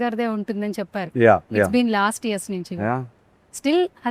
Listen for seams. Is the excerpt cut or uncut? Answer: uncut